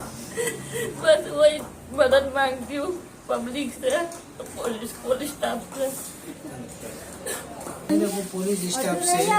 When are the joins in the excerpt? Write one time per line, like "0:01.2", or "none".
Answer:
0:07.9